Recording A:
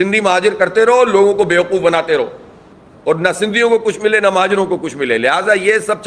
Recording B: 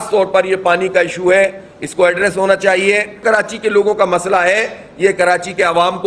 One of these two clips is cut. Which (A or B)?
B